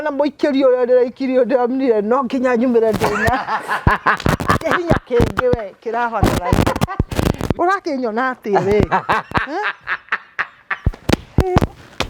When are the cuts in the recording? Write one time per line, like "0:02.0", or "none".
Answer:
0:07.6